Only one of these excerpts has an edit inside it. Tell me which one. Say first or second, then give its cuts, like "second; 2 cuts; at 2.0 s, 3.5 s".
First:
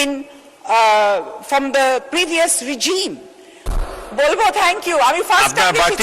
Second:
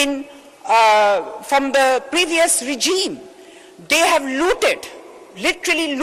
first; 1 cut; at 3.7 s